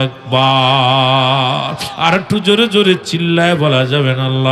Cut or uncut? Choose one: uncut